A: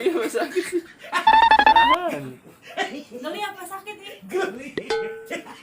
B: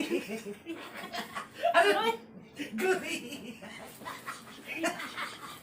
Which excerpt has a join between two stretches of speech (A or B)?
A